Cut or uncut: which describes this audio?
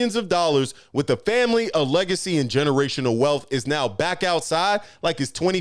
uncut